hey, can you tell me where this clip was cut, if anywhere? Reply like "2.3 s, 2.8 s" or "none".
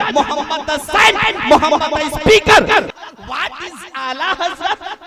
2.9 s